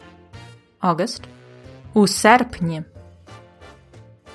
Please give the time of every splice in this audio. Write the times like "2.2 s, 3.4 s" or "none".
2.9 s